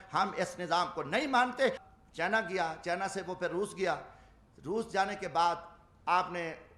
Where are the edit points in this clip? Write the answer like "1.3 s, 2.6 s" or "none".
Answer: 1.9 s